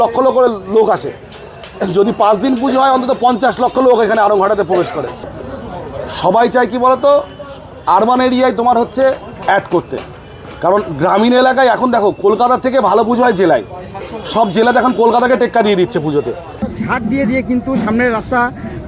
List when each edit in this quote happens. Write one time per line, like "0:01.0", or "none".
0:05.2
0:16.7